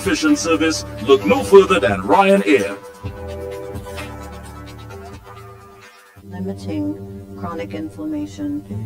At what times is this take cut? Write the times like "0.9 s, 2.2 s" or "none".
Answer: 6.3 s